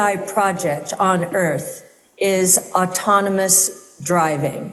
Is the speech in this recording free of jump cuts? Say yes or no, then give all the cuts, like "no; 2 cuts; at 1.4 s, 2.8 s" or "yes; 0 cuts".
yes; 0 cuts